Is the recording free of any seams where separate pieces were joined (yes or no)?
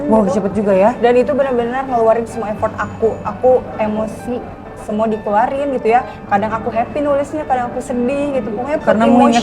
yes